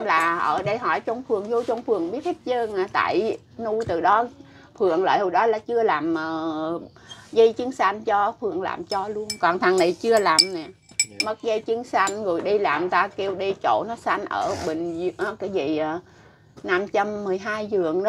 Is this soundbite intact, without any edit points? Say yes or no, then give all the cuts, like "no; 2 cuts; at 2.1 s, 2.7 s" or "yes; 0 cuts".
yes; 0 cuts